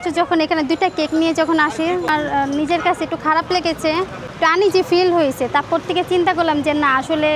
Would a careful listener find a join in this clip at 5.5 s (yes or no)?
no